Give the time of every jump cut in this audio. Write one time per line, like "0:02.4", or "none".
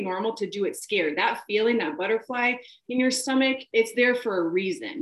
0:03.6